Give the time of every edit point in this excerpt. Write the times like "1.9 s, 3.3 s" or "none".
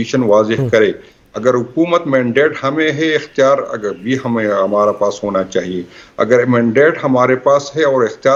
none